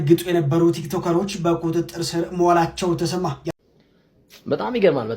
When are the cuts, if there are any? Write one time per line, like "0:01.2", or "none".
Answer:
0:03.4